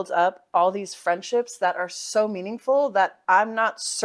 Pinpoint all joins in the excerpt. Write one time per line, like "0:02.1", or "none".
none